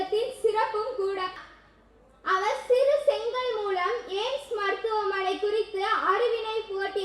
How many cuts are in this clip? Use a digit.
1